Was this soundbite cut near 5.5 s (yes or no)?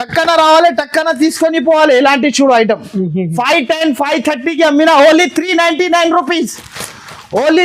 no